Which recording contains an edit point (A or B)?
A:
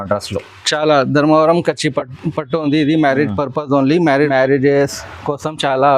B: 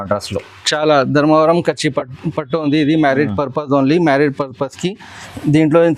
A